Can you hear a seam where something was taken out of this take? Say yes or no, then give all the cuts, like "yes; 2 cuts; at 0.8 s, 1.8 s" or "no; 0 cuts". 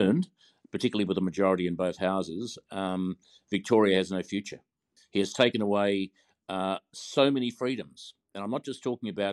yes; 1 cut; at 5.0 s